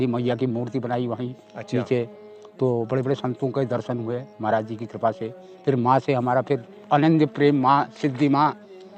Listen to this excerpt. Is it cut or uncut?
uncut